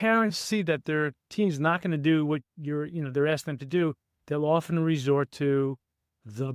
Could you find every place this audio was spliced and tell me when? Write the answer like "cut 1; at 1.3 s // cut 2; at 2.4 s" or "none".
none